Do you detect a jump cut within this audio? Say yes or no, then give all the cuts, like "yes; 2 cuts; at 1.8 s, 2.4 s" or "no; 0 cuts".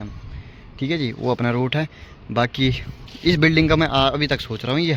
no; 0 cuts